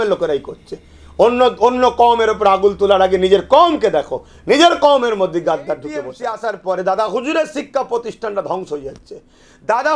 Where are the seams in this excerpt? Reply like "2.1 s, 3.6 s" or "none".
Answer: 6.1 s